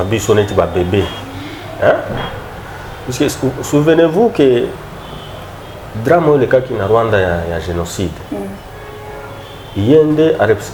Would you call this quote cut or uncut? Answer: uncut